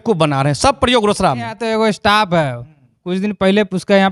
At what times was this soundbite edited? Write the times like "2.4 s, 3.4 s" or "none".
1.6 s